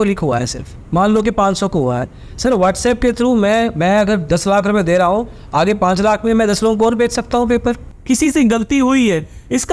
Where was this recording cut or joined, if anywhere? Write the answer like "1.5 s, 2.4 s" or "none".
7.9 s

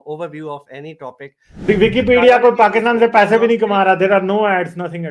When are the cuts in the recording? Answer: 1.7 s

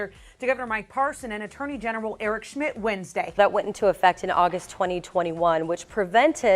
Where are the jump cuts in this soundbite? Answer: 3.3 s

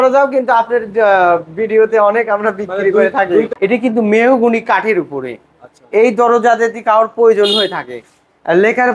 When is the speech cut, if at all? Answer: 3.5 s

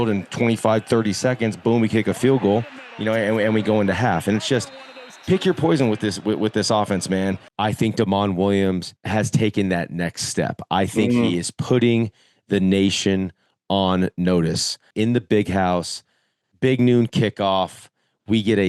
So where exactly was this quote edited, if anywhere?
7.5 s, 14.9 s

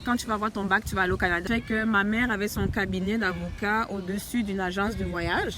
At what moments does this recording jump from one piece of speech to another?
1.4 s

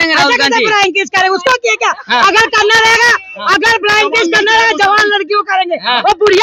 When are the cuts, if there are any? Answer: none

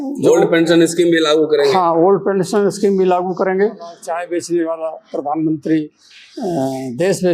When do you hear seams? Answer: 4.0 s

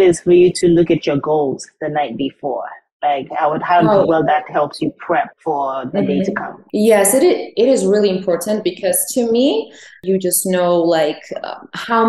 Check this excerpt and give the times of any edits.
5.3 s, 6.5 s, 10.0 s

